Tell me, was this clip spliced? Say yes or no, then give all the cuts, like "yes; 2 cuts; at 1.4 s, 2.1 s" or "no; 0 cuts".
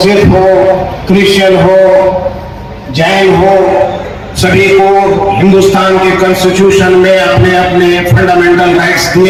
no; 0 cuts